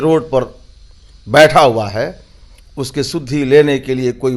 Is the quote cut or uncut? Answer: uncut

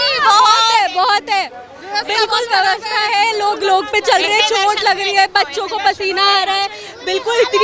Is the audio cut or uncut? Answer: uncut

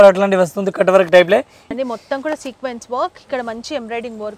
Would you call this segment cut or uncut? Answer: cut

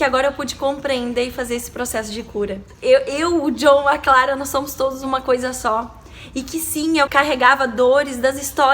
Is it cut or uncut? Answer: cut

